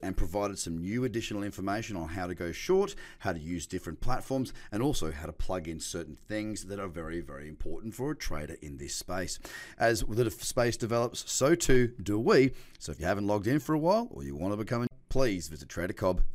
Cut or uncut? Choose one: cut